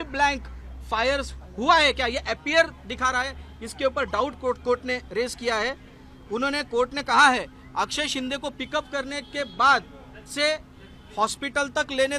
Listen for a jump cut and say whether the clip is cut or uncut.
uncut